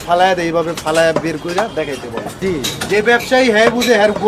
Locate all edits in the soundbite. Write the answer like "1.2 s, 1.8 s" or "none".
2.3 s

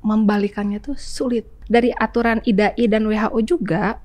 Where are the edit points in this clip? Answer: 1.5 s

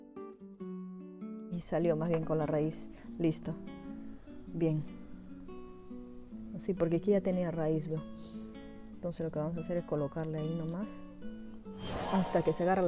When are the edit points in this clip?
1.6 s

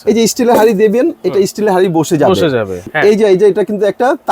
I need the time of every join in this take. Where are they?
2.9 s

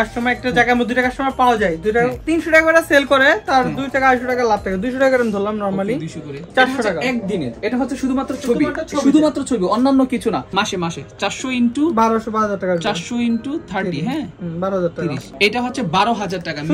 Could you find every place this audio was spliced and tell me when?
2.2 s, 6.3 s, 10.5 s

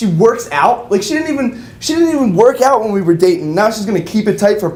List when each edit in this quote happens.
none

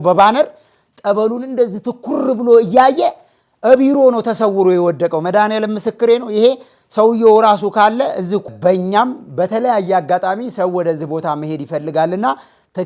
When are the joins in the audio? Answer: 8.5 s

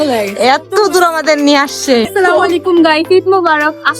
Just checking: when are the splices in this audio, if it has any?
2.1 s

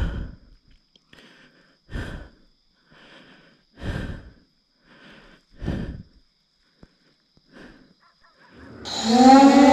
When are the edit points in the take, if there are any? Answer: 8.5 s

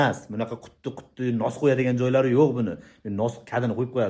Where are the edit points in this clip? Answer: none

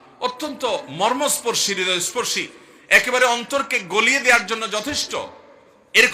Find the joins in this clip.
none

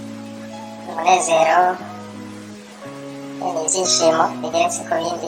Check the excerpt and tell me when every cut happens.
0.9 s, 1.8 s, 3.4 s

